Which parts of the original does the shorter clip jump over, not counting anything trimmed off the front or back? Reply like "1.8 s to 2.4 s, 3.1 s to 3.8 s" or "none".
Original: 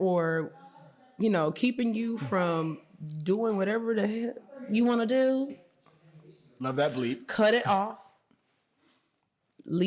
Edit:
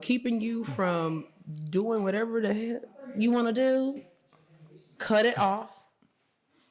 6.5 s to 7.2 s